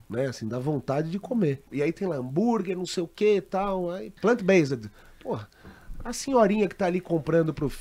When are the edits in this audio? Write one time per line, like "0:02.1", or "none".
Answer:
0:01.6
0:04.1

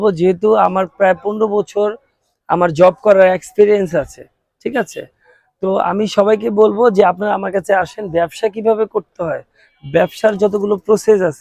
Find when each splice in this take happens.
none

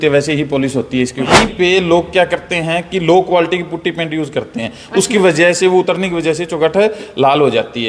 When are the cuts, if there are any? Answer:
0:01.3

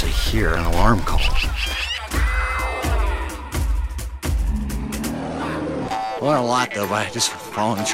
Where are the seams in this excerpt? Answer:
none

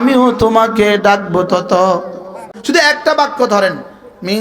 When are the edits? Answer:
0:02.5

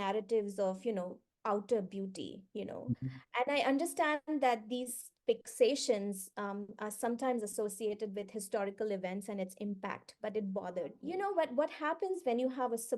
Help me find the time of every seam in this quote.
0:11.0

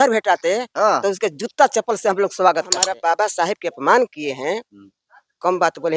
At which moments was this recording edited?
0:02.9

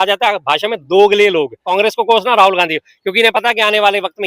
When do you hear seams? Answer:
0:01.6

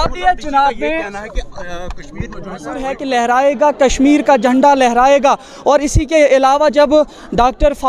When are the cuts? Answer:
0:02.9

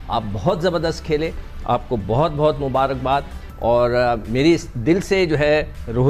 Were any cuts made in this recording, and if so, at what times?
none

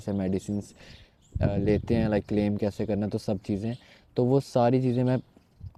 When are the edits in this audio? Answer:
none

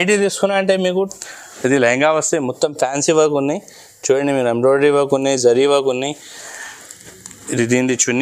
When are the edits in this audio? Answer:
0:01.0

